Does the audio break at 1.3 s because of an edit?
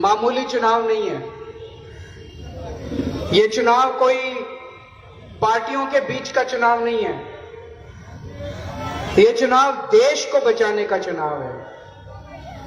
no; 0 cuts

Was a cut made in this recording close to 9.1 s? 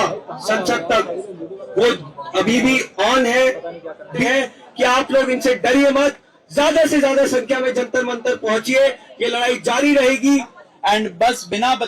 no; 2 cuts; at 4.2 s, 10.6 s

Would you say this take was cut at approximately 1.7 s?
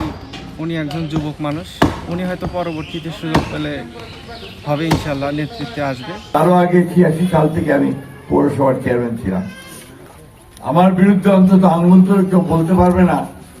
no; 1 cut; at 6.2 s

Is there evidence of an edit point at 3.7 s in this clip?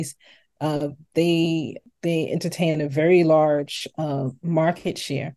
no; 1 cut; at 1.8 s

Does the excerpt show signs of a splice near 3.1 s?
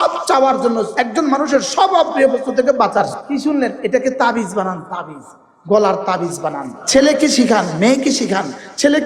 yes; 3 cuts; at 0.9 s, 3.1 s, 6.7 s

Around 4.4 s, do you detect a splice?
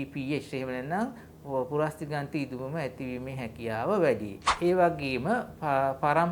yes; 1 cut; at 4.4 s

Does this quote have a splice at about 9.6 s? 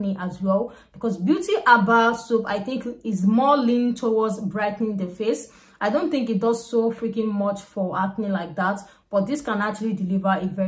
no; 0 cuts

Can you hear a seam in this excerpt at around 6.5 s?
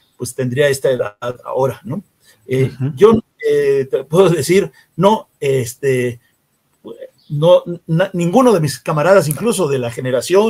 no; 0 cuts

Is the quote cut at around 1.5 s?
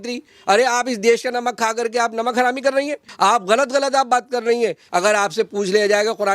no; 2 cuts; at 3.0 s, 4.8 s

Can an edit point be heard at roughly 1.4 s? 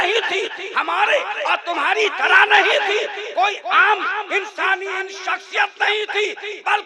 no; 0 cuts

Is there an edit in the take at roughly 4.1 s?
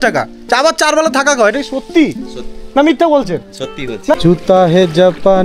yes; 1 cut; at 4.1 s

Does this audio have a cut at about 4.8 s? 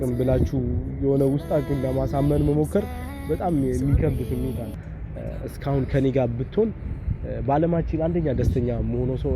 yes; 1 cut; at 4.8 s

